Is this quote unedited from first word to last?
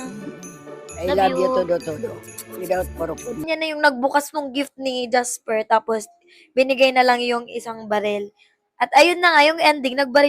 no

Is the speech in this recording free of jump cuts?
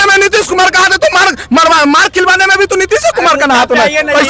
yes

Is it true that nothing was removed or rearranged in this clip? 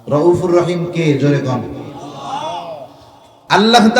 no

